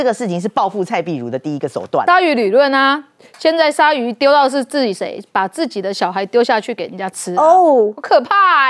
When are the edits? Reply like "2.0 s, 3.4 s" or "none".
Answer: 2.0 s